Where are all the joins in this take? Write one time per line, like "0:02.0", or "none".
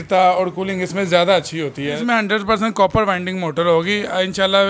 0:01.9